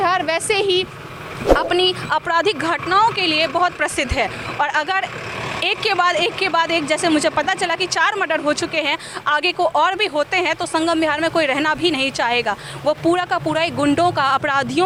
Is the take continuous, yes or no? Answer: yes